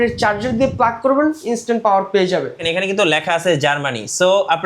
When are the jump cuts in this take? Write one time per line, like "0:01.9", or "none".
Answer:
0:02.6